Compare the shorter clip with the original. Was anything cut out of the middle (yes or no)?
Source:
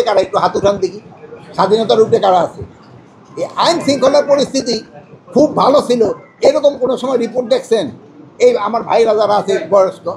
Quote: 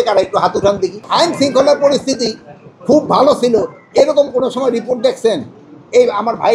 yes